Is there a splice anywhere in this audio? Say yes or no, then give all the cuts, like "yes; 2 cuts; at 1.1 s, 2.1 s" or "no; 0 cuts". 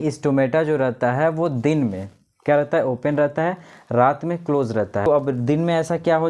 yes; 1 cut; at 5.1 s